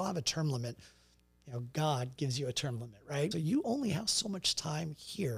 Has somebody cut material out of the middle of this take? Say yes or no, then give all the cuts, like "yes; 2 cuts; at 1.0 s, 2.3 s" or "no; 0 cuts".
yes; 1 cut; at 3.3 s